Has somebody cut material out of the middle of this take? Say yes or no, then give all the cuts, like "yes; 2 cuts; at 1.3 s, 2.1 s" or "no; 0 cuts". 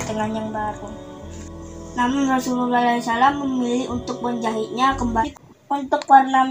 yes; 1 cut; at 5.2 s